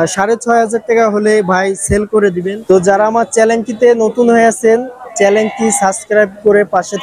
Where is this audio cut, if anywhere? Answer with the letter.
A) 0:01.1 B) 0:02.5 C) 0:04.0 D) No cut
B